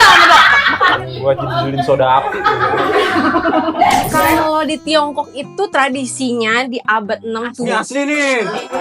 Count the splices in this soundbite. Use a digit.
1